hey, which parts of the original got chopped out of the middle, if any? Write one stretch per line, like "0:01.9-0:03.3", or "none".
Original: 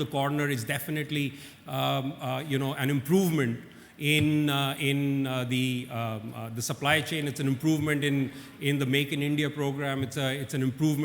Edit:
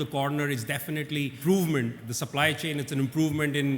0:01.4-0:03.0
0:03.7-0:06.6